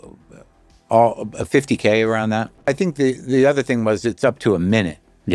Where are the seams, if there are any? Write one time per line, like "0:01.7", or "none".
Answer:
0:02.6